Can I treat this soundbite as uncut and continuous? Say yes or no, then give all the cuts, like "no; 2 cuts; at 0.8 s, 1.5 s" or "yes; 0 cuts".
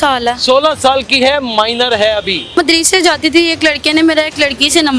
no; 1 cut; at 2.6 s